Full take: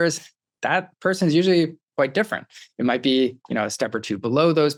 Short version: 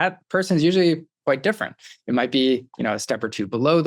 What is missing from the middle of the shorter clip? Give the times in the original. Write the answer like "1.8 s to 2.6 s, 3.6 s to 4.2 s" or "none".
none